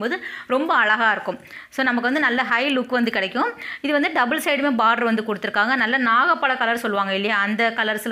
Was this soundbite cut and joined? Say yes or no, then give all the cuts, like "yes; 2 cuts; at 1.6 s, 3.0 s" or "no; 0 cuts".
no; 0 cuts